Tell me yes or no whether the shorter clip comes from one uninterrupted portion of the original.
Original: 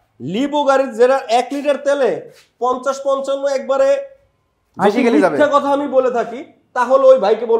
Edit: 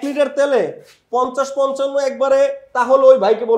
no